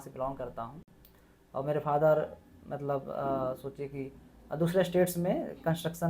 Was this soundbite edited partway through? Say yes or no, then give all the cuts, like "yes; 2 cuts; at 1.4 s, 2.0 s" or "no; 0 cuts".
no; 0 cuts